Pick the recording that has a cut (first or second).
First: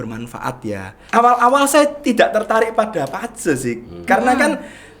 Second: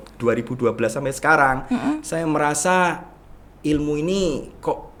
first